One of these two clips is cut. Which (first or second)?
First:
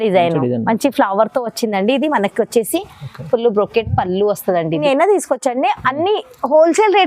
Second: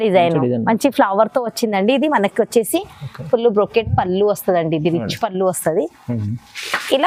first